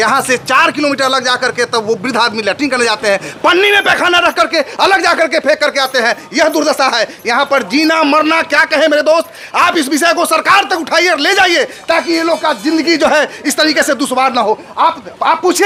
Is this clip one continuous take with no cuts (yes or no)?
yes